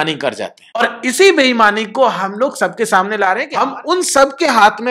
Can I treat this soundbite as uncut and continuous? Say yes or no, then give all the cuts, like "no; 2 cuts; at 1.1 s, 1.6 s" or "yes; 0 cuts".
no; 2 cuts; at 0.8 s, 3.5 s